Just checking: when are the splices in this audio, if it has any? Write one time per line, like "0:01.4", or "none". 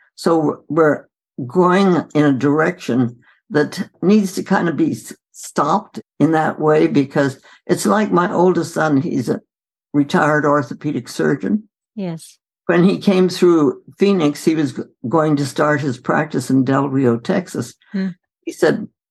0:03.9
0:05.9